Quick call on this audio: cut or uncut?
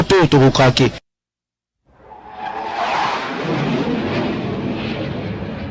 cut